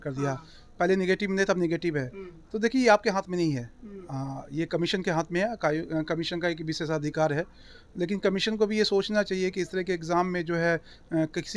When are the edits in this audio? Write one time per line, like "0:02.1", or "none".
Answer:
none

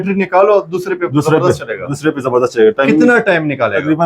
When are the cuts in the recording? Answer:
none

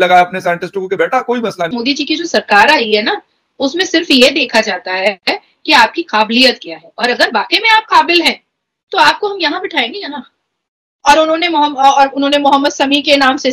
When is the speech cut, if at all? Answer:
0:01.6
0:10.8

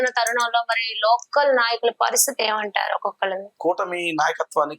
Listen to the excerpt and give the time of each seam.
0:03.5

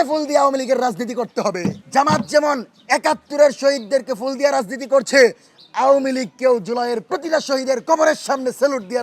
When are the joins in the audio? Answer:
0:01.7

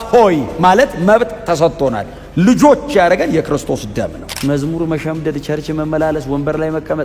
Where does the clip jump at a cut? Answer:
0:04.3

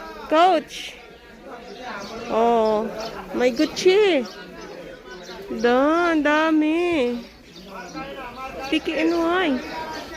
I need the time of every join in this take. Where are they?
0:08.7

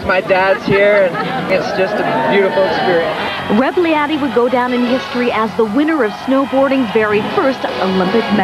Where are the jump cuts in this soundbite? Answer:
none

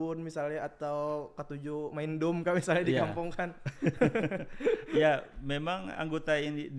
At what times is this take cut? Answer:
none

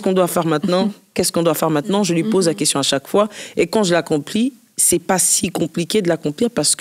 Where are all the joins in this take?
none

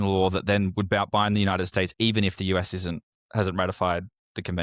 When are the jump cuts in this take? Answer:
0:03.1

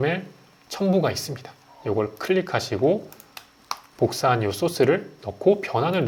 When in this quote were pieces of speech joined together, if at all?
none

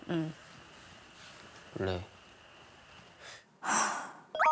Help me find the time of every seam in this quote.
none

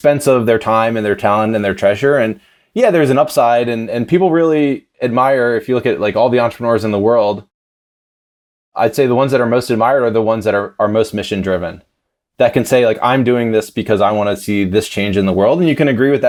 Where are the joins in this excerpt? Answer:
none

